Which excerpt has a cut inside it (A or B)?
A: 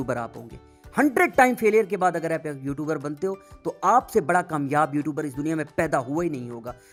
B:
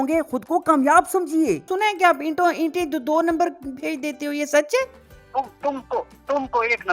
B